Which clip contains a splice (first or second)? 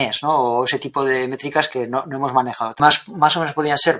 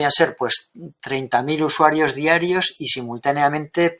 first